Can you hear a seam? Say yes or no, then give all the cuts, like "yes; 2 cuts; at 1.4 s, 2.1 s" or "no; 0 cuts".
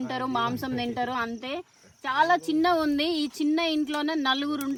no; 0 cuts